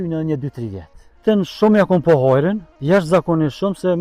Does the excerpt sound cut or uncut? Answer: cut